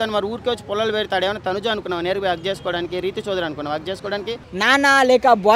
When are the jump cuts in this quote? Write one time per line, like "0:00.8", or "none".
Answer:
0:04.5